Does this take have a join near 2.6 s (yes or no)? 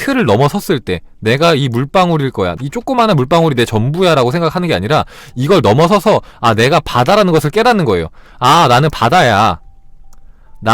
yes